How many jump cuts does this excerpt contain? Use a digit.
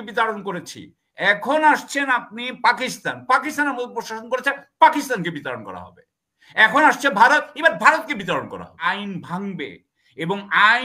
1